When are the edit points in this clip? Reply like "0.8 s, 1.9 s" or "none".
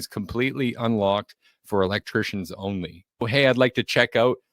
3.3 s

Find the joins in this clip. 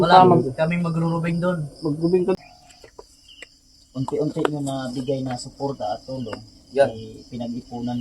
2.3 s

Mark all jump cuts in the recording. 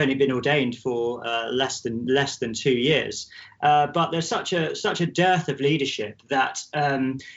none

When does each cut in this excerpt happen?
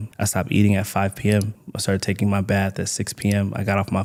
none

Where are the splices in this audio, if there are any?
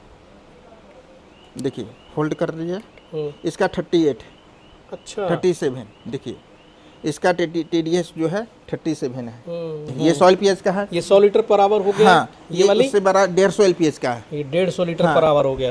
9.9 s

